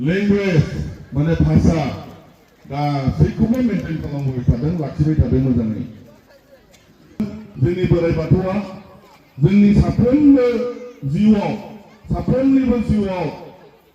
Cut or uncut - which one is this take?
cut